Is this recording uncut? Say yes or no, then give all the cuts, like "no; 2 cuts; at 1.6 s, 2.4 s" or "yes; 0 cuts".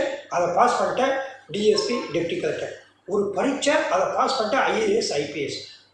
yes; 0 cuts